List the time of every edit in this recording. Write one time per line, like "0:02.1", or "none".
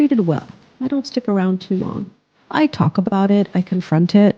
none

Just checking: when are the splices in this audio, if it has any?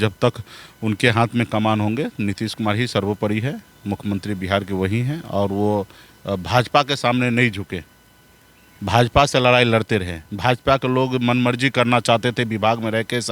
none

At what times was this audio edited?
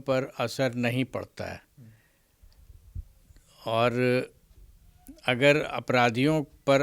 none

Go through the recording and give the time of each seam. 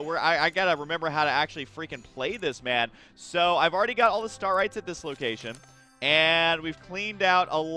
none

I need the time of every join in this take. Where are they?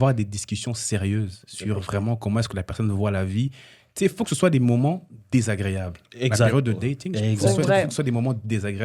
none

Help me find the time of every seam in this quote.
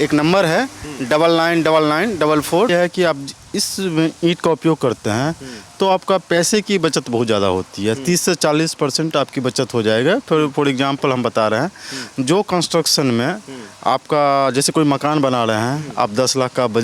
0:02.7

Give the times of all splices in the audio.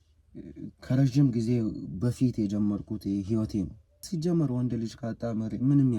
0:04.1

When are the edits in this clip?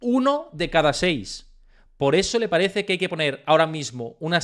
none

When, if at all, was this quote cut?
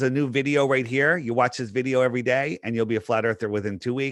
none

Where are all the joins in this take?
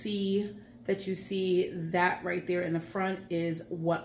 none

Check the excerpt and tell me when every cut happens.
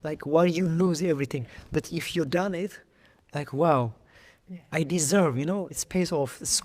0:05.8

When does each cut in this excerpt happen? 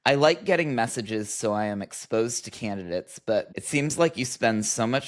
0:03.5

